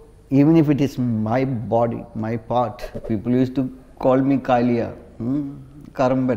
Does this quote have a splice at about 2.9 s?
yes; 1 cut; at 2.9 s

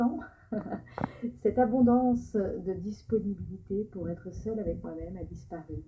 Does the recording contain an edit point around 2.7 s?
yes; 1 cut; at 2.7 s

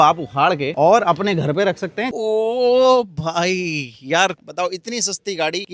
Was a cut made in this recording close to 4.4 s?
yes; 2 cuts; at 2.1 s, 4.4 s

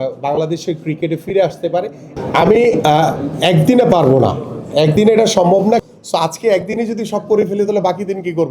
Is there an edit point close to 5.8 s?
yes; 2 cuts; at 2.0 s, 5.8 s

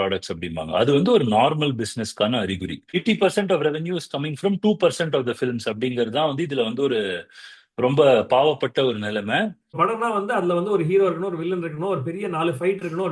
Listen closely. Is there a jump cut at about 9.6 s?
yes; 1 cut; at 9.6 s

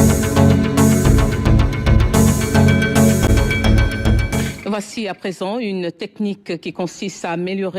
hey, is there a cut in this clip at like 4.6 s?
yes; 1 cut; at 4.6 s

